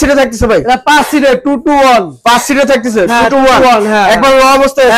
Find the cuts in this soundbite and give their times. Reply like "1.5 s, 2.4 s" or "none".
none